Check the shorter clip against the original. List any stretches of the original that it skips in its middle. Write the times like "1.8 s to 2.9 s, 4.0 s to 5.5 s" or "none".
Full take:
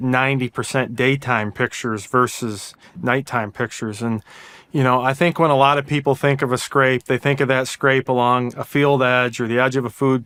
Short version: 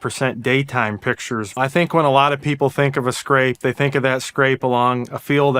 2.1 s to 5.0 s